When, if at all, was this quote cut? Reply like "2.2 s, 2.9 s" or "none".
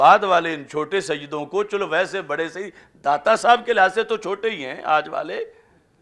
none